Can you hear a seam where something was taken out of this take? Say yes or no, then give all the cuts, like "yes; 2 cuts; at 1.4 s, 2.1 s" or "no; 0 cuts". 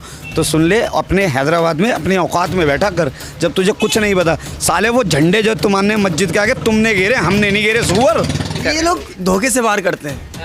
yes; 1 cut; at 8.6 s